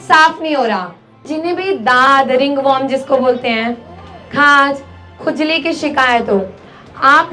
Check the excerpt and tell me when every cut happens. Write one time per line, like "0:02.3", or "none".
0:01.3